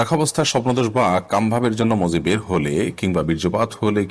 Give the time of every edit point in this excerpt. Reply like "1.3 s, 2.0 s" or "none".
none